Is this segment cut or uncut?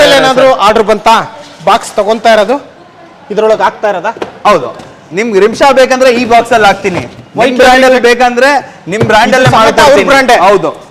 uncut